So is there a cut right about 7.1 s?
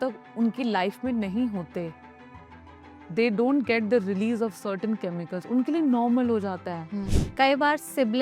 yes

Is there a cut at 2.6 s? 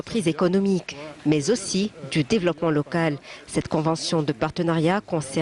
yes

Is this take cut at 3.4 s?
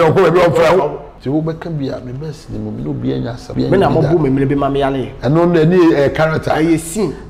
yes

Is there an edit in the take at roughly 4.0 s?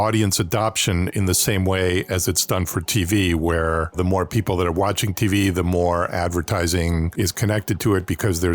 yes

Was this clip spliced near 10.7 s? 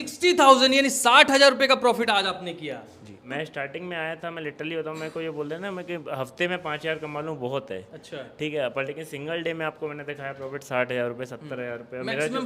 no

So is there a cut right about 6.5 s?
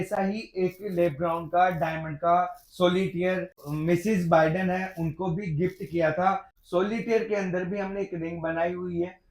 yes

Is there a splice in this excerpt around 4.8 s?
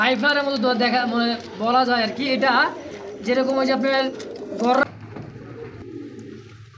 yes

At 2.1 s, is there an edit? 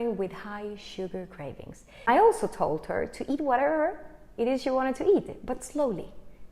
yes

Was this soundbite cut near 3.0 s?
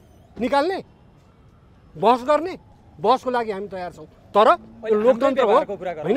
no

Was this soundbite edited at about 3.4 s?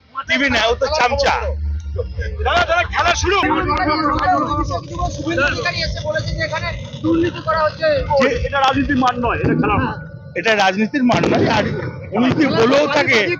yes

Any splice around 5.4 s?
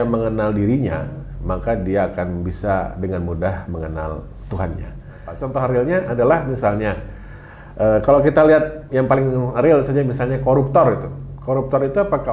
yes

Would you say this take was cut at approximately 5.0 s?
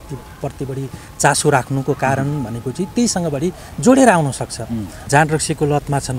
yes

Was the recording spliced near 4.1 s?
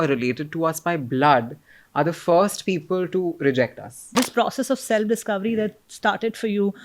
yes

